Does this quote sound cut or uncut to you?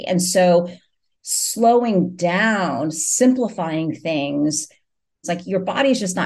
cut